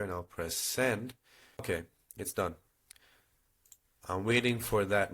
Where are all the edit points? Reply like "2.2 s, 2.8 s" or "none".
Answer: 1.6 s